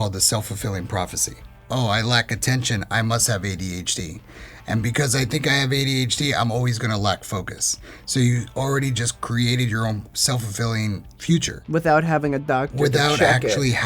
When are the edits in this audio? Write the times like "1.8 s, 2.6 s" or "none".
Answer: 1.5 s, 11.1 s

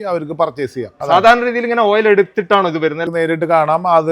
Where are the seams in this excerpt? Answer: 0.9 s, 3.0 s

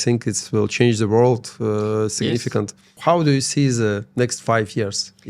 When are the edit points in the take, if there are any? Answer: 3.0 s

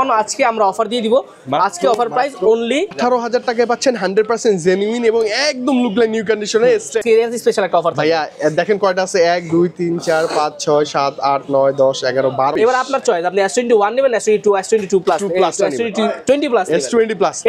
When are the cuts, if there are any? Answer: 2.9 s, 7.0 s, 12.5 s

